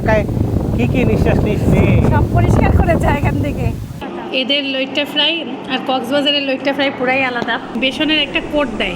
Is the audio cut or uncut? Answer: cut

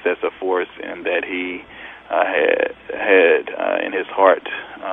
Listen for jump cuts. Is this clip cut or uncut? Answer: uncut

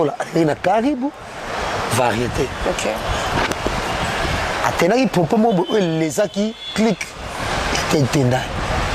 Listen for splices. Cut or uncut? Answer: uncut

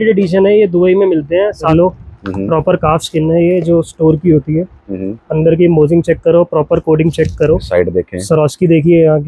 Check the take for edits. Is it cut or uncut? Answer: cut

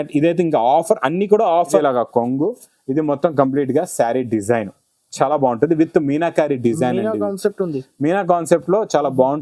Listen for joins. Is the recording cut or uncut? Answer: cut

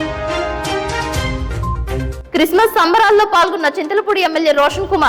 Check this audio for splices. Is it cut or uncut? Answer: cut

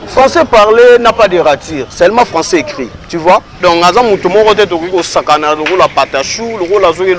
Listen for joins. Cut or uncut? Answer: cut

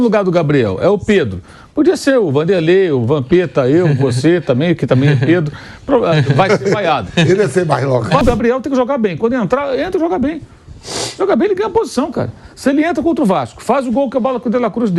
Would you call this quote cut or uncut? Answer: cut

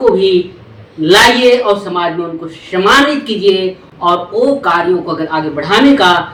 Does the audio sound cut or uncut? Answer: uncut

